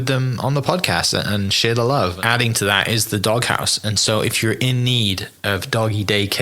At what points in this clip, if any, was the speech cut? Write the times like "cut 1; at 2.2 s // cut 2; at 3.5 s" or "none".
cut 1; at 2.2 s